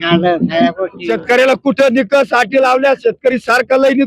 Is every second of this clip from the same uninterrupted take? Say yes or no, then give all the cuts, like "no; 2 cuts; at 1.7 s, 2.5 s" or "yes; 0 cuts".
no; 1 cut; at 0.9 s